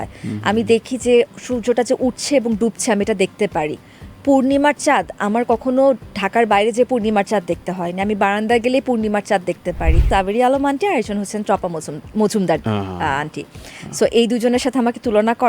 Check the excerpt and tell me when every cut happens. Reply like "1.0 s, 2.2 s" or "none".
10.0 s